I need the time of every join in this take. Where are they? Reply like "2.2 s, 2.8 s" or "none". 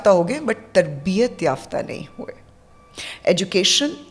none